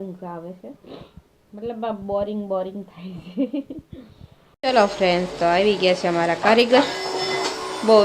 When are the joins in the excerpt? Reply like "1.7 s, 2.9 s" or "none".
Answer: 4.6 s